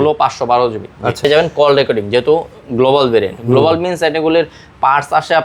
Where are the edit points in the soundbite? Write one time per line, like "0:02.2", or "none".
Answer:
0:01.2